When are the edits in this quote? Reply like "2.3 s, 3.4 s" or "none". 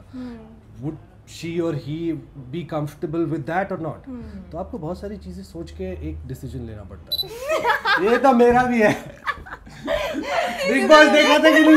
7.2 s